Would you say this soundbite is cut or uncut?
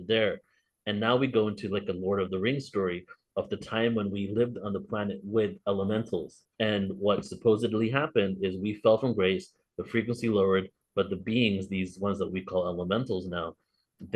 cut